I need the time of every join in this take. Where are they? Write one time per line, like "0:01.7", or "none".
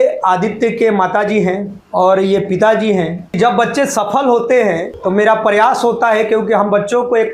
0:01.7
0:03.4
0:04.9